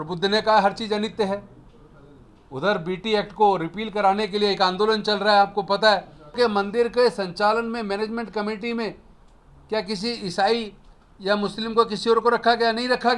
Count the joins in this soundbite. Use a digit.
1